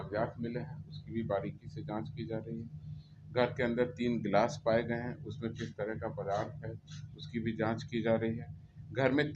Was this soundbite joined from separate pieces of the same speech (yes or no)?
no